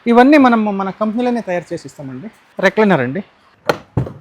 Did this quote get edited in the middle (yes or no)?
yes